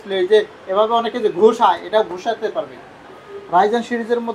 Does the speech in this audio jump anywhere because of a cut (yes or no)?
yes